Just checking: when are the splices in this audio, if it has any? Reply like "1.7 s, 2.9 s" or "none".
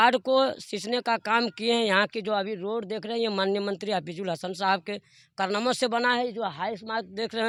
none